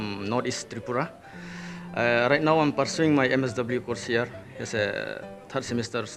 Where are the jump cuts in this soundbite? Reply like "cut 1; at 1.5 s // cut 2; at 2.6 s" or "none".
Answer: none